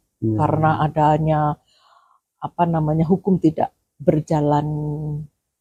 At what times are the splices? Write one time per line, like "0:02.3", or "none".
none